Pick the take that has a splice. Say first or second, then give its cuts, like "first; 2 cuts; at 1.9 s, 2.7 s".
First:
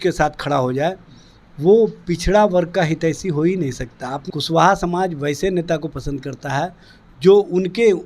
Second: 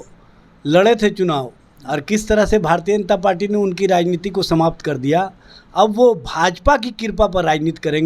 first; 1 cut; at 4.2 s